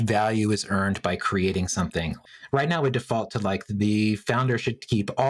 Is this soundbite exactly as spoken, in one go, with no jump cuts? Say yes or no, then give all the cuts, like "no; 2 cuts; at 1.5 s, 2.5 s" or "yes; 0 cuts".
no; 1 cut; at 2.2 s